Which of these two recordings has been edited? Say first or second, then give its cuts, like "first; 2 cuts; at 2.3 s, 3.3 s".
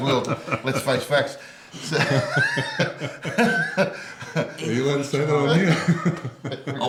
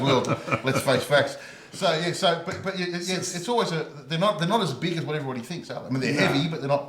second; 1 cut; at 1.7 s